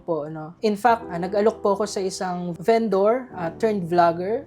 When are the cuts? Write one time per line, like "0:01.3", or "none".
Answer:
0:01.0